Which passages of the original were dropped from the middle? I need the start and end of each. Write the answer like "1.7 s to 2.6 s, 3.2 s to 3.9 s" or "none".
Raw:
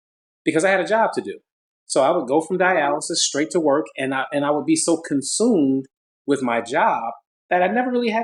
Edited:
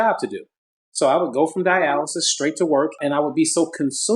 3.9 s to 4.3 s